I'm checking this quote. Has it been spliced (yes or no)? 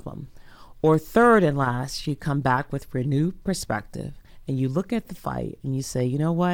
no